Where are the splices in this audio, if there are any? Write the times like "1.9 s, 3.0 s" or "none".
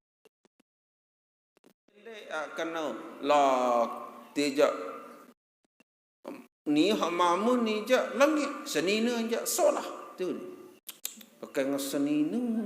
2.3 s